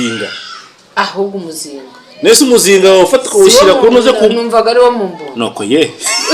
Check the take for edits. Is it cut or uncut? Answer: uncut